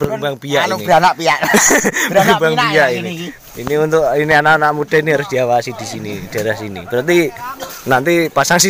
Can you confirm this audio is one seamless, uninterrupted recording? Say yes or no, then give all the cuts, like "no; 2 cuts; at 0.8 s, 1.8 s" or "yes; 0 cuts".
yes; 0 cuts